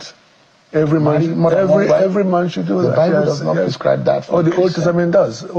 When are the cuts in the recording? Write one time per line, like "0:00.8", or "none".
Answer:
none